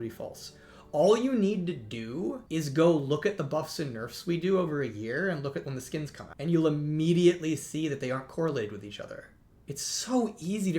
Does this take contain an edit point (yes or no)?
yes